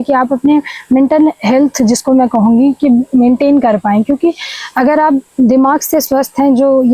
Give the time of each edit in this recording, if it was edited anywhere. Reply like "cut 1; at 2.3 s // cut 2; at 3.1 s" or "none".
none